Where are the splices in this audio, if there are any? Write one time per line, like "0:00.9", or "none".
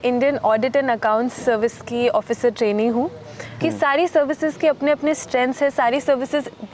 0:03.5